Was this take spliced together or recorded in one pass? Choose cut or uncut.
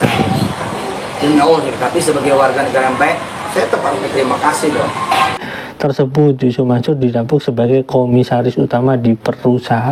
cut